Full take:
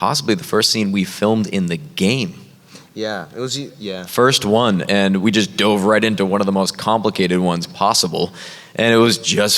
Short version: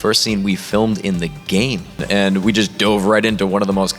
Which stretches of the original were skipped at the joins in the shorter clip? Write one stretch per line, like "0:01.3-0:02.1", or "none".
0:02.5-0:04.8